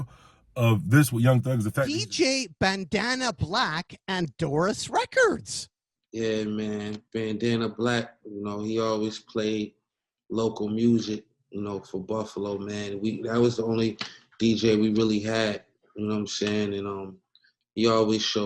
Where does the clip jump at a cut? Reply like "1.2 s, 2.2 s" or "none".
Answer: 1.7 s